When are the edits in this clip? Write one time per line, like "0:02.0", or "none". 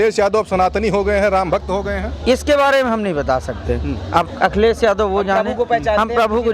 none